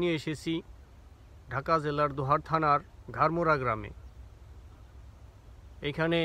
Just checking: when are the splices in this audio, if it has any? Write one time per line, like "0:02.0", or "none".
none

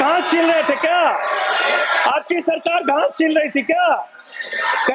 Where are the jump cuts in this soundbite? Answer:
none

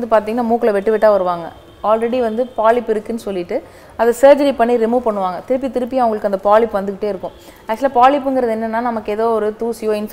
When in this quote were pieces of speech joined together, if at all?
none

